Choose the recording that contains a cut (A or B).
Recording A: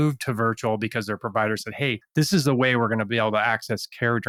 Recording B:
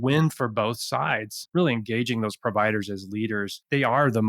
B